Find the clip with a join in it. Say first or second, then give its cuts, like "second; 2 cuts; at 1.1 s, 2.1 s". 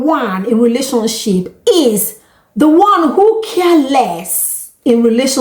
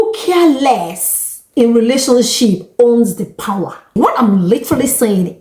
second; 1 cut; at 3.9 s